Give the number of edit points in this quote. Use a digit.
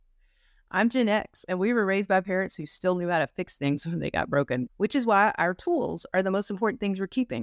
1